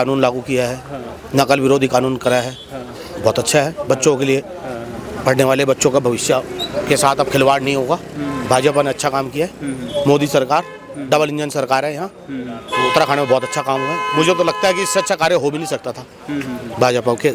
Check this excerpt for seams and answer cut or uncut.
uncut